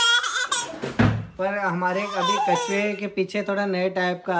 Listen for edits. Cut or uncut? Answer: uncut